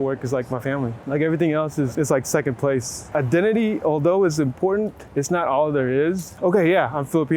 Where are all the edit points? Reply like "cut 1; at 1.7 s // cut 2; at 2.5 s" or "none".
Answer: cut 1; at 1.0 s // cut 2; at 1.9 s // cut 3; at 3.0 s // cut 4; at 5.0 s // cut 5; at 6.3 s